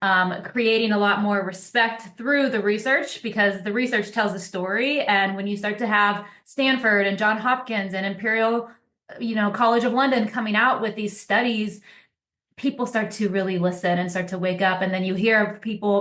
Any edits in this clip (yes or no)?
no